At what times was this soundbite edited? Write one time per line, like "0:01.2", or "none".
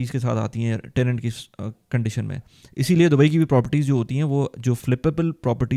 none